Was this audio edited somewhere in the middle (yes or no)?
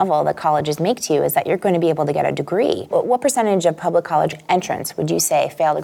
yes